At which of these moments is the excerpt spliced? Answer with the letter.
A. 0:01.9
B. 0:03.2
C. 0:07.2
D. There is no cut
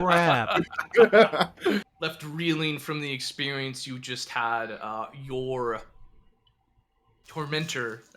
A